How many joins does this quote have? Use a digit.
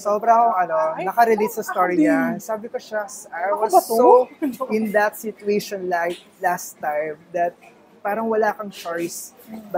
0